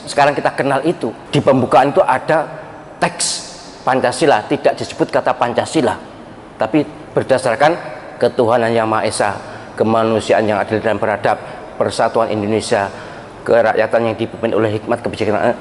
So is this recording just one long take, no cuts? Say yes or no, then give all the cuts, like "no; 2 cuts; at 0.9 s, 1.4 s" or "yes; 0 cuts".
no; 1 cut; at 1.2 s